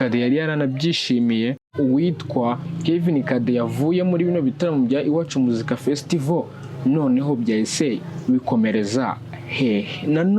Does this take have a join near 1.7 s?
yes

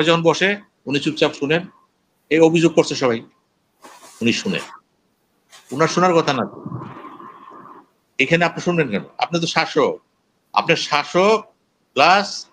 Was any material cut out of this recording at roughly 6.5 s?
no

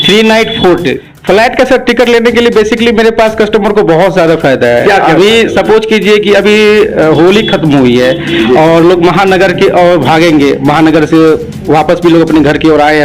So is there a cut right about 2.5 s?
no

